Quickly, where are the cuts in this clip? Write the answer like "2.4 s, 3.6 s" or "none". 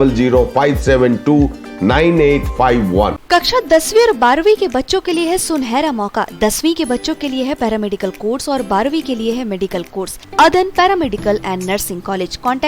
3.2 s, 10.2 s